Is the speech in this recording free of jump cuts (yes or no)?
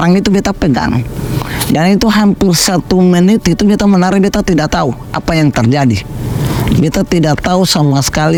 yes